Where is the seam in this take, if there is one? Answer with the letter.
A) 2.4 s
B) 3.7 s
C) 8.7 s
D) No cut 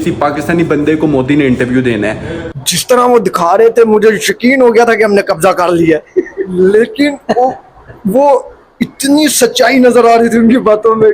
A